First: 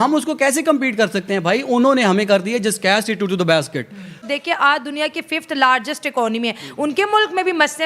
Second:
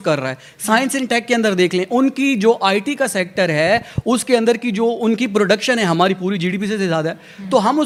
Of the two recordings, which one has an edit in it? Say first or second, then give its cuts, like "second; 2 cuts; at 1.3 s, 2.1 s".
first; 1 cut; at 4.2 s